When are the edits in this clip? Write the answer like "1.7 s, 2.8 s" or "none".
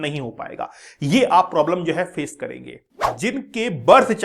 3.1 s